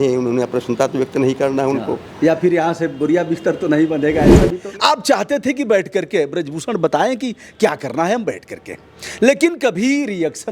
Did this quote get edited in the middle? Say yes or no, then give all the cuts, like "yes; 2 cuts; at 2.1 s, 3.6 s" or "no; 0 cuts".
yes; 1 cut; at 4.5 s